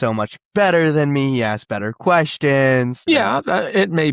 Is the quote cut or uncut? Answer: cut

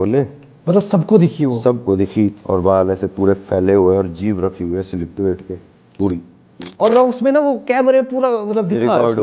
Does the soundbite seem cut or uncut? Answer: cut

